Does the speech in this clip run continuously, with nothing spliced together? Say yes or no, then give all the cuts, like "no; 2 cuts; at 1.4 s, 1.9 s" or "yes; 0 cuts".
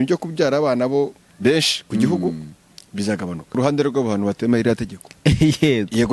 no; 1 cut; at 3.5 s